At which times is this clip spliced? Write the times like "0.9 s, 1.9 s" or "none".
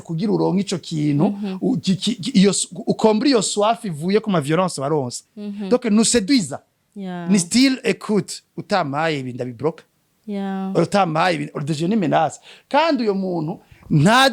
none